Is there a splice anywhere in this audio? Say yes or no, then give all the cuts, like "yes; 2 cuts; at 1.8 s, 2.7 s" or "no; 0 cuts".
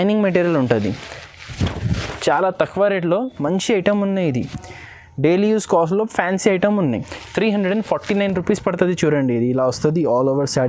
no; 0 cuts